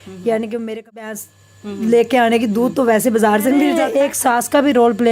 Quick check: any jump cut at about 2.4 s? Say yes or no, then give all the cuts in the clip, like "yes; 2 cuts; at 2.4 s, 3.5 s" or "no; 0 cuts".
no; 2 cuts; at 1.2 s, 3.8 s